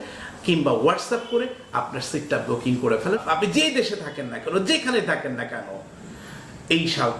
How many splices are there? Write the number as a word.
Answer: one